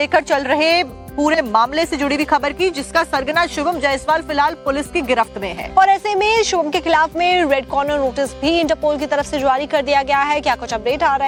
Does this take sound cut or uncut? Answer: uncut